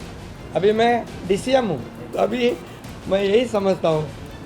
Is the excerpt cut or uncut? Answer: cut